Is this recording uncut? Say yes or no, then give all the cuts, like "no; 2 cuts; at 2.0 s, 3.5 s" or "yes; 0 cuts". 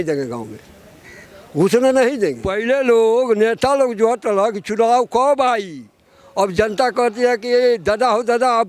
no; 1 cut; at 2.5 s